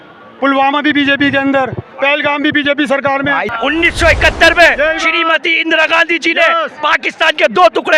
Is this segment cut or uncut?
cut